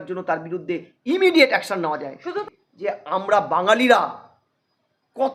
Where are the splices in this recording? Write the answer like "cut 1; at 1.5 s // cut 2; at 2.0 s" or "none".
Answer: cut 1; at 2.6 s